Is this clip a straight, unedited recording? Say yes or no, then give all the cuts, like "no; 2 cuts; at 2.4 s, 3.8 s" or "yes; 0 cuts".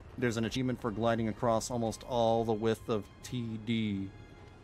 yes; 0 cuts